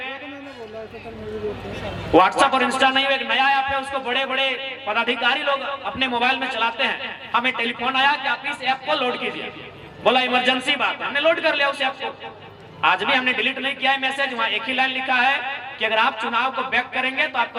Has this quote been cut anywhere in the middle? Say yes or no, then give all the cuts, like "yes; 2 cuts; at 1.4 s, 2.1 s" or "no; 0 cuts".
no; 0 cuts